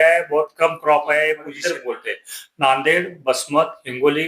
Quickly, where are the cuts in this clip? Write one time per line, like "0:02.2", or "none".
0:01.5